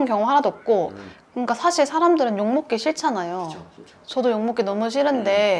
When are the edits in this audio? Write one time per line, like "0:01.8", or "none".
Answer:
0:01.1